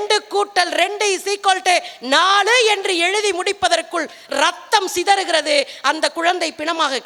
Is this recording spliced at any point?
no; 0 cuts

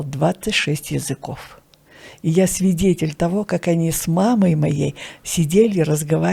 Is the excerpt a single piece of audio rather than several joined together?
yes; 0 cuts

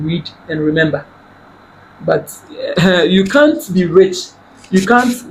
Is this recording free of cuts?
yes; 0 cuts

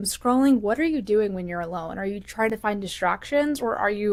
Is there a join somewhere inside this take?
no; 0 cuts

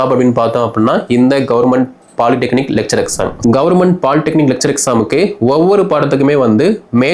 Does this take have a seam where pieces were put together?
yes; 1 cut; at 3.3 s

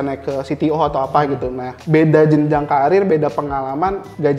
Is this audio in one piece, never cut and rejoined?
yes; 0 cuts

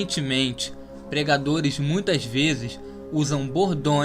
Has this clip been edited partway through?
yes; 1 cut; at 1.4 s

